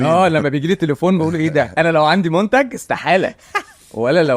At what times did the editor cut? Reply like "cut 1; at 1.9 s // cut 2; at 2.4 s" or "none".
cut 1; at 1.7 s